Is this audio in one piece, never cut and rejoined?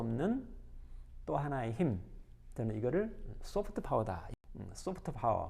no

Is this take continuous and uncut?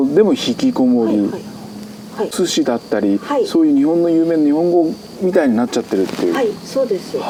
yes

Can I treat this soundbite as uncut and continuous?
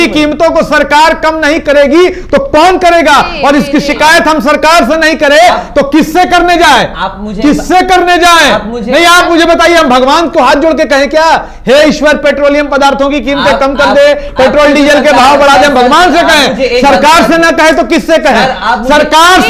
yes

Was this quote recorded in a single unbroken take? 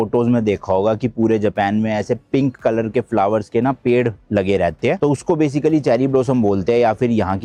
yes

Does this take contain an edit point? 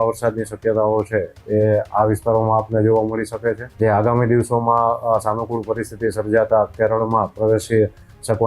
yes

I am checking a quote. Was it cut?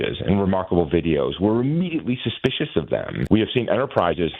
yes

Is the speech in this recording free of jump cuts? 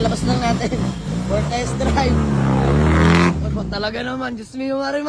yes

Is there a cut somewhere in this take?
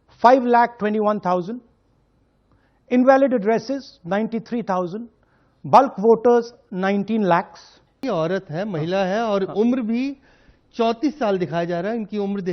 yes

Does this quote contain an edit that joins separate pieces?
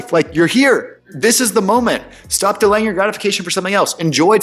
yes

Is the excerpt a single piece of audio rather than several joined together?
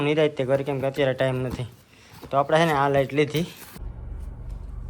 no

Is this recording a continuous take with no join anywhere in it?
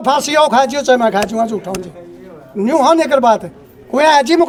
yes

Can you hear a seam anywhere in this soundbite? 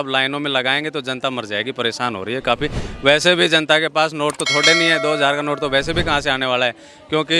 no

